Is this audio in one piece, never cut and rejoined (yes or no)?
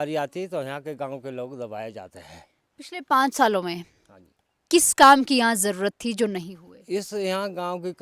yes